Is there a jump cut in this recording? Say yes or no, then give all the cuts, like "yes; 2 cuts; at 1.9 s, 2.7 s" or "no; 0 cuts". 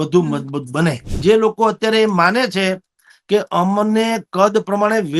yes; 1 cut; at 1.1 s